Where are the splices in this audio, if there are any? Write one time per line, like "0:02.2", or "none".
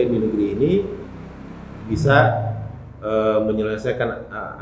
none